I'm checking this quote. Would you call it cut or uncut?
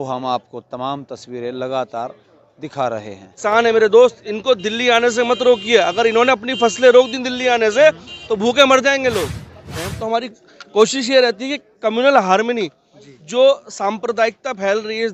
cut